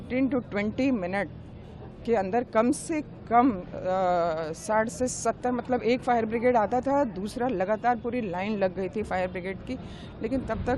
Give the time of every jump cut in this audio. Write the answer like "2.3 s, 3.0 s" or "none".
none